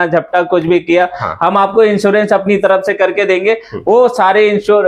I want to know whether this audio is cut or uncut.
uncut